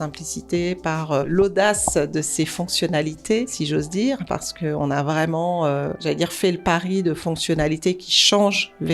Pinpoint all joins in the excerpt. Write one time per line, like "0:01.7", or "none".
0:01.3
0:03.6
0:06.0

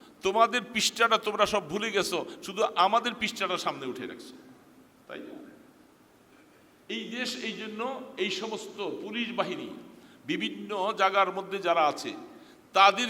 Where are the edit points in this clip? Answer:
none

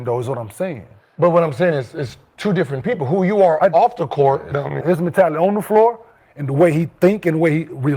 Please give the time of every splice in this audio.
0:04.8

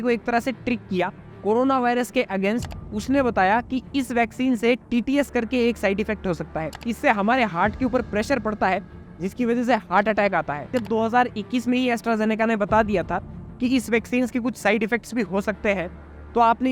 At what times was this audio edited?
0:02.8
0:06.8
0:10.7

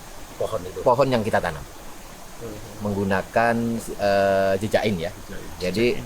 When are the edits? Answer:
none

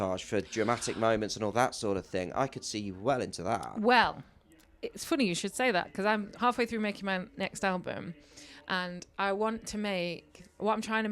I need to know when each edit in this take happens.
none

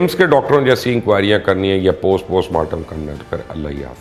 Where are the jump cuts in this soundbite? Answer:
none

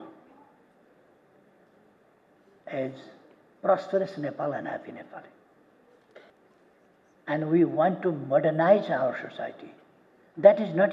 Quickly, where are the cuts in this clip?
0:06.3

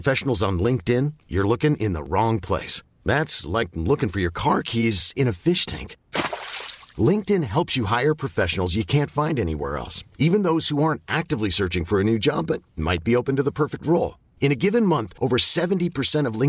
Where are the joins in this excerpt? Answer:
none

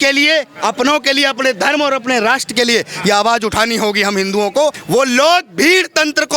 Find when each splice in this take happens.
0:04.8

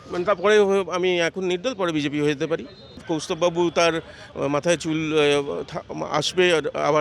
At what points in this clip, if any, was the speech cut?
0:03.0

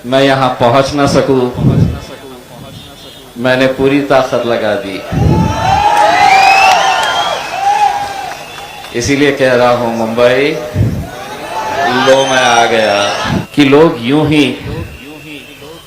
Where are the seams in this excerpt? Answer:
0:13.3

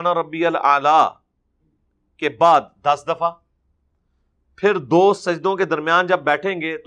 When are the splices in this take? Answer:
none

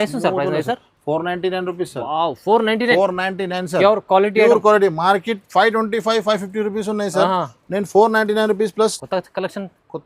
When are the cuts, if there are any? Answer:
0:09.0

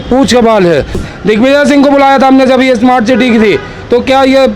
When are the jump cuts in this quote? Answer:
0:01.0

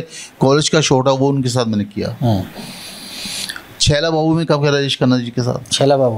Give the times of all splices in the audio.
none

